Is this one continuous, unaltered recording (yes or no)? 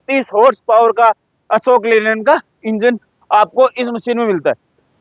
yes